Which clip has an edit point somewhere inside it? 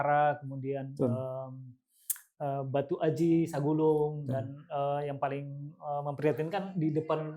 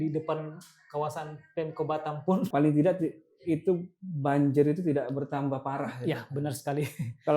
second; 1 cut; at 2.5 s

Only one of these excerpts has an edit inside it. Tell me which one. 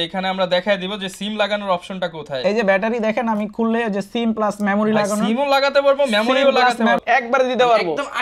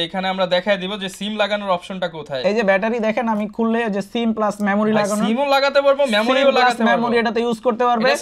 first; 1 cut; at 7.0 s

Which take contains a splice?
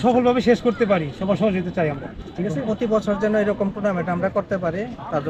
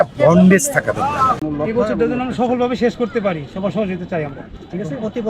second; 1 cut; at 1.4 s

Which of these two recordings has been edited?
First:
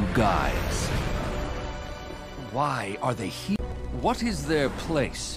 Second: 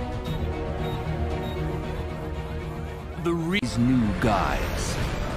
first; 1 cut; at 3.8 s

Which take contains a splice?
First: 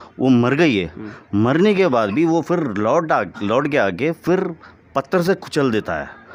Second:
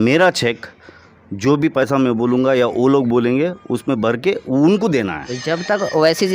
second; 1 cut; at 5.3 s

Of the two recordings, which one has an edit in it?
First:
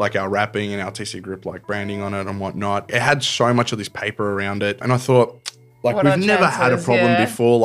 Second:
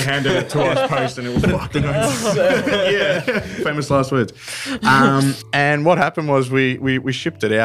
first; 2 cuts; at 2.9 s, 4.8 s

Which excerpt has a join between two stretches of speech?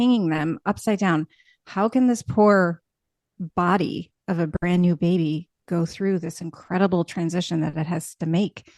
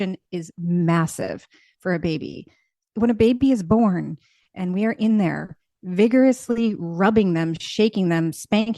second; 1 cut; at 2.7 s

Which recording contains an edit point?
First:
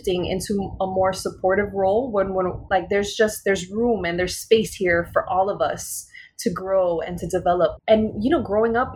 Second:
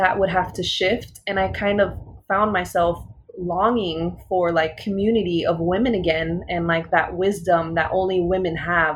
first; 2 cuts; at 2.6 s, 7.8 s

